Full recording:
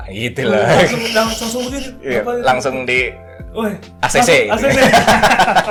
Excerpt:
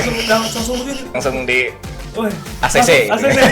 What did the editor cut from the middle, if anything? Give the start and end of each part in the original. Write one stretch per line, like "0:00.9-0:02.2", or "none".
0:02.0-0:02.6